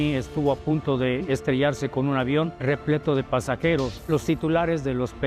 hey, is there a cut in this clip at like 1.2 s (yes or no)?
no